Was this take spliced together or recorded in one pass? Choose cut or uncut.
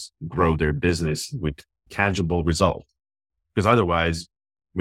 cut